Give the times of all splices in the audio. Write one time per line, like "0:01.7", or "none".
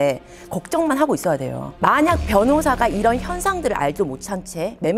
0:01.6

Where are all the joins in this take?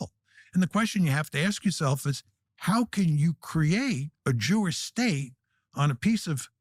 none

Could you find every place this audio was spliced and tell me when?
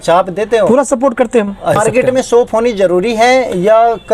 0:01.8

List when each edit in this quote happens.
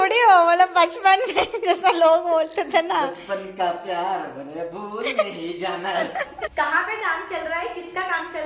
0:06.4

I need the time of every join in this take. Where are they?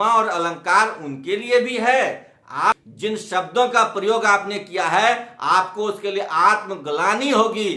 0:02.7

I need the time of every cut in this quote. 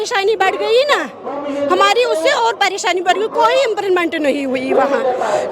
none

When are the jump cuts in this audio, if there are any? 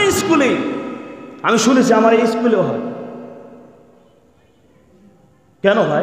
none

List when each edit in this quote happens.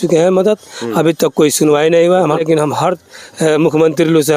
0:02.4

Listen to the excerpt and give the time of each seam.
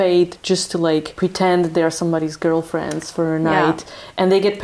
0:01.1

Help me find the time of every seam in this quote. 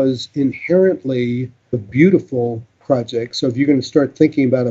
0:01.8

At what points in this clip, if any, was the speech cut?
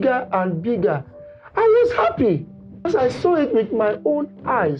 0:02.9

